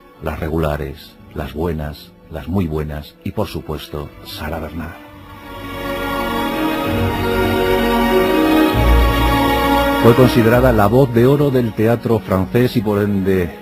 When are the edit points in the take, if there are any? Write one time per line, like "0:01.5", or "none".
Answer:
0:07.6